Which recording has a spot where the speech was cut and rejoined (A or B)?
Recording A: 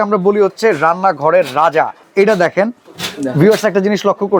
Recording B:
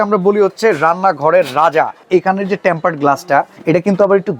B